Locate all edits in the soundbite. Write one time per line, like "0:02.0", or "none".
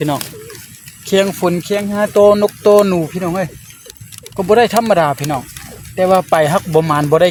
none